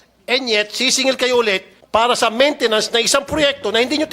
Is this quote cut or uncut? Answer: cut